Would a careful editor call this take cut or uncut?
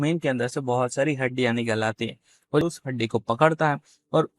cut